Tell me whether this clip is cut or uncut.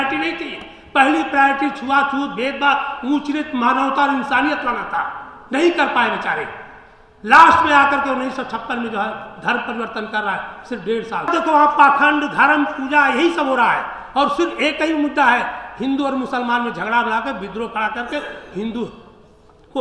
cut